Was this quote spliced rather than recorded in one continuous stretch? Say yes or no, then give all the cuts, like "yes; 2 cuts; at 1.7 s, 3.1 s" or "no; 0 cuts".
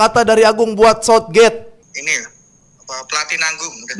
yes; 1 cut; at 1.8 s